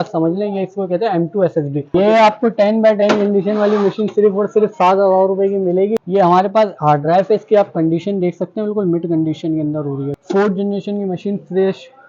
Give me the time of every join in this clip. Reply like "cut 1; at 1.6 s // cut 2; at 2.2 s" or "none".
cut 1; at 1.9 s // cut 2; at 6.0 s // cut 3; at 10.1 s

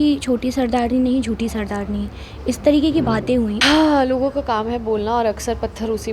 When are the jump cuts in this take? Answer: cut 1; at 3.6 s

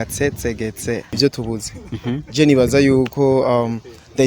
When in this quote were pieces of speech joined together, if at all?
cut 1; at 1.1 s

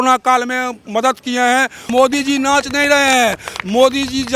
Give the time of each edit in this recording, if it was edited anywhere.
cut 1; at 1.9 s

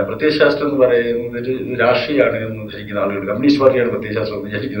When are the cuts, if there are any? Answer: none

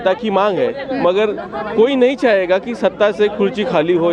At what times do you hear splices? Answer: none

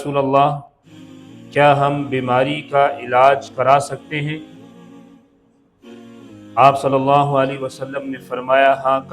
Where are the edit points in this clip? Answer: cut 1; at 4.5 s // cut 2; at 5.9 s

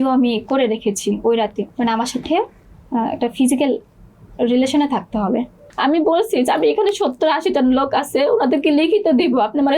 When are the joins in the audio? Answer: cut 1; at 1.6 s // cut 2; at 5.7 s

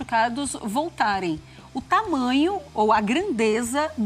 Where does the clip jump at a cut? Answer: none

